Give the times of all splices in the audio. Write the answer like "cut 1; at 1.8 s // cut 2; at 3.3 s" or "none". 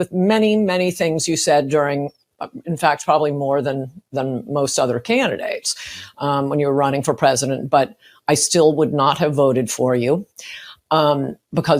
none